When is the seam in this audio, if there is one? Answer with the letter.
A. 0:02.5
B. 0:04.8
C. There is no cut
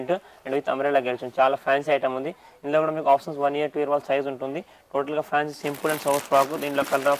C